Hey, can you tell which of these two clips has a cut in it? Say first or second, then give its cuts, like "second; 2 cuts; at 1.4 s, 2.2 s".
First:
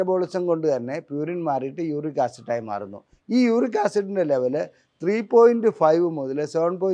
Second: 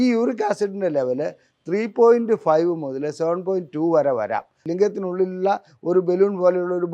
second; 1 cut; at 4.5 s